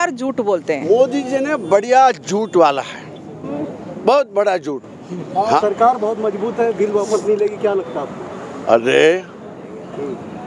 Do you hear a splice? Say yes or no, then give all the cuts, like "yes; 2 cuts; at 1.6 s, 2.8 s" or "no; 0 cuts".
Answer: yes; 1 cut; at 5.6 s